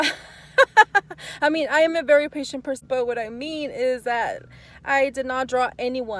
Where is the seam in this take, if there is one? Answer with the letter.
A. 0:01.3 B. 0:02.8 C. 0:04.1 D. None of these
B